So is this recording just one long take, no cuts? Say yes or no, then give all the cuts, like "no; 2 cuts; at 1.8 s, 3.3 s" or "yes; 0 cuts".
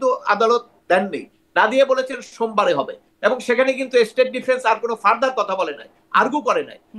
yes; 0 cuts